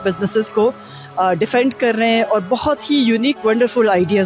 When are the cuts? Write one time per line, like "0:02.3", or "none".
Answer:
none